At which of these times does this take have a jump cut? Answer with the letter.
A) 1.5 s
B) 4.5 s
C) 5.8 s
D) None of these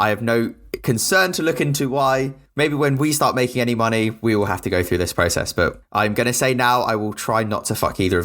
C